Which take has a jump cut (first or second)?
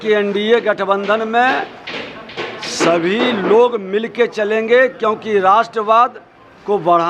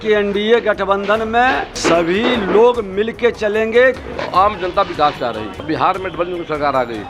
second